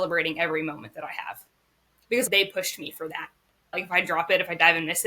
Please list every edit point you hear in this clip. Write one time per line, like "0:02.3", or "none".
0:02.3
0:03.8